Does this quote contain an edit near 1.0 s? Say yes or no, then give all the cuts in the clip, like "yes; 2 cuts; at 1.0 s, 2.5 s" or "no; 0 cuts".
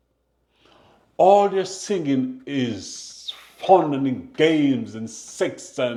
no; 0 cuts